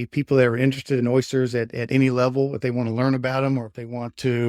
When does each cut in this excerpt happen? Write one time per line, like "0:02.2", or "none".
none